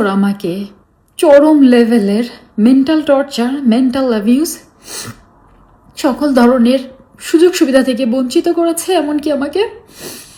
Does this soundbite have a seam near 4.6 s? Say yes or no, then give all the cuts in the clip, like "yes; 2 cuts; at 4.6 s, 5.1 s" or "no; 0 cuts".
no; 0 cuts